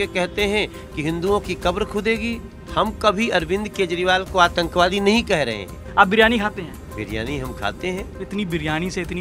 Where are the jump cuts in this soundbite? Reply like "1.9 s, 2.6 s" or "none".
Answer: 2.5 s, 5.8 s, 6.8 s, 8.2 s